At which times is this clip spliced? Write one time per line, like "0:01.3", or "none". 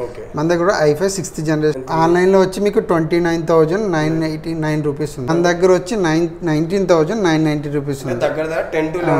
0:01.8
0:05.3